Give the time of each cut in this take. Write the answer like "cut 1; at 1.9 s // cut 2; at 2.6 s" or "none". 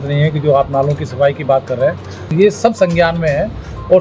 cut 1; at 2.3 s